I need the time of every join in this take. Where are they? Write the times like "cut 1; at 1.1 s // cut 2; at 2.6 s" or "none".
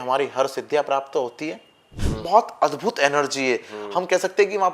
cut 1; at 2.1 s